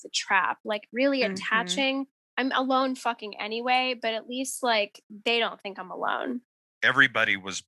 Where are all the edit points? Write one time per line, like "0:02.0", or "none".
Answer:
0:06.6